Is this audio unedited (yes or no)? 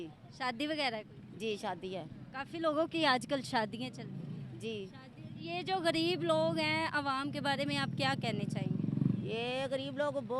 yes